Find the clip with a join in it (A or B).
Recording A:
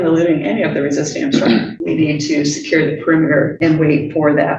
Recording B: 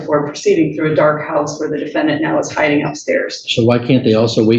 A